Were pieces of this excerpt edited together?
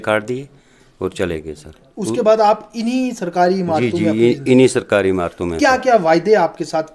no; 0 cuts

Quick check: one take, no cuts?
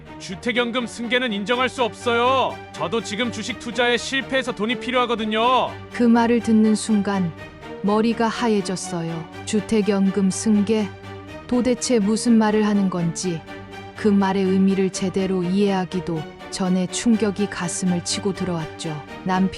yes; 0 cuts

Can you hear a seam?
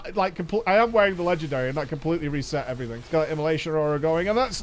yes; 1 cut; at 2.9 s

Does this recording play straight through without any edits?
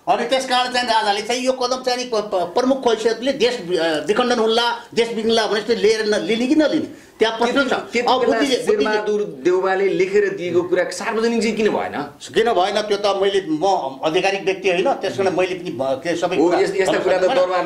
yes; 0 cuts

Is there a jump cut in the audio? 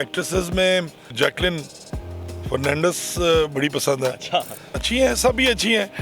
yes; 2 cuts; at 1.1 s, 4.8 s

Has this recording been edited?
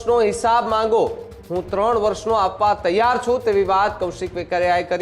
no; 0 cuts

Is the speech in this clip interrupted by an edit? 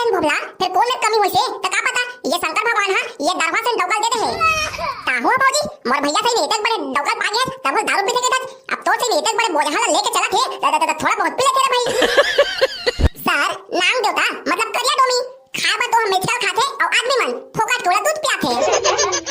yes; 1 cut; at 13.1 s

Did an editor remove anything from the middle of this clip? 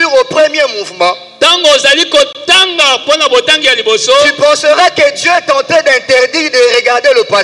no; 0 cuts

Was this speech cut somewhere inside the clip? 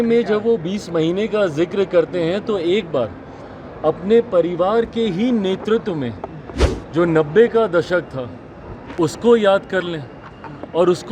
no; 0 cuts

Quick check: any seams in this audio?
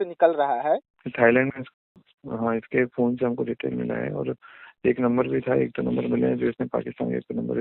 yes; 1 cut; at 1.0 s

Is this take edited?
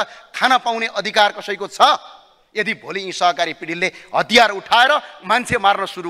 no; 0 cuts

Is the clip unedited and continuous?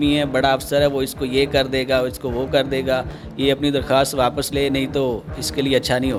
yes; 0 cuts

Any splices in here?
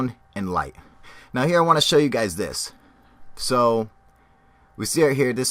no; 0 cuts

